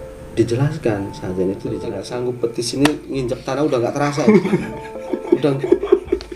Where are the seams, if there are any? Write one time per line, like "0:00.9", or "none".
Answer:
0:01.9

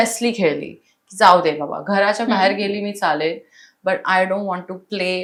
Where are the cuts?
none

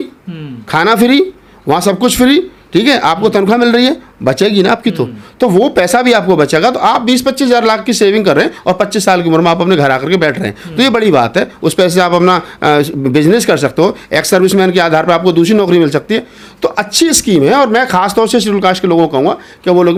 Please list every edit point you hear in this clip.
none

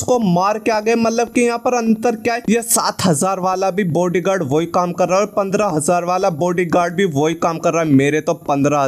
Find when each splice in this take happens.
0:02.4

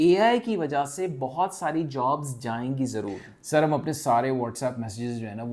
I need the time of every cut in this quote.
0:03.2

